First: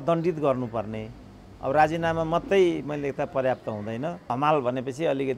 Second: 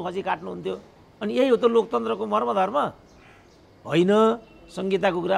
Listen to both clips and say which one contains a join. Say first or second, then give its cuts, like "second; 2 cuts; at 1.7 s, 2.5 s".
first; 1 cut; at 4.3 s